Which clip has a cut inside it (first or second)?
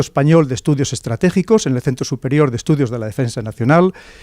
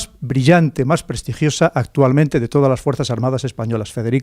first